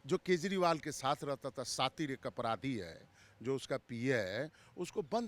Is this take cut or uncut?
uncut